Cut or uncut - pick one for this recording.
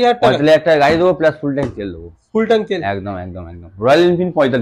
uncut